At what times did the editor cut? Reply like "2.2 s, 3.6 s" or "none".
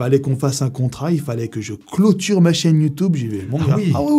none